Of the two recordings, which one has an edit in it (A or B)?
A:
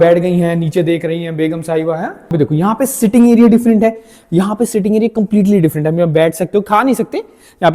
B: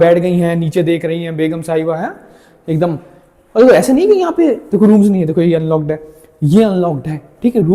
A